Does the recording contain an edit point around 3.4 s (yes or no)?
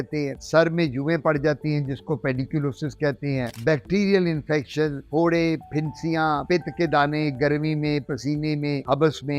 no